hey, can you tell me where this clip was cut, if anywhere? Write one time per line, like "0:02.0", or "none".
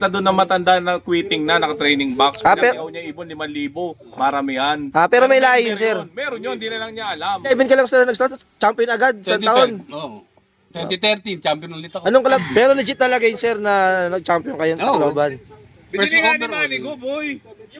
0:07.5
0:12.4